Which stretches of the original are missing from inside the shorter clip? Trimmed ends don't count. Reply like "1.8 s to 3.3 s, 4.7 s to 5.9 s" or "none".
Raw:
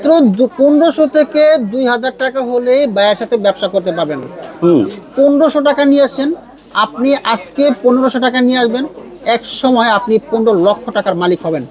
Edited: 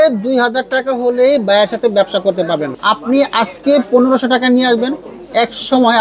4.2 s to 6.6 s